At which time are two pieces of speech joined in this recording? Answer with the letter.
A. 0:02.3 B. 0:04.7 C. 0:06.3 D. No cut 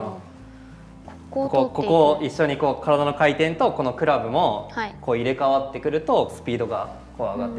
C